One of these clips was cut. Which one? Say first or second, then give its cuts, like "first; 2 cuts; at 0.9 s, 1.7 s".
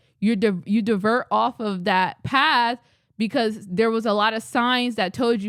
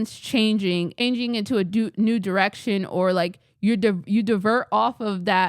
second; 1 cut; at 1.0 s